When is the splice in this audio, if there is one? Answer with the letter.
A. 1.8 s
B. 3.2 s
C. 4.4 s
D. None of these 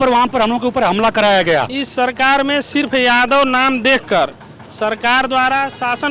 A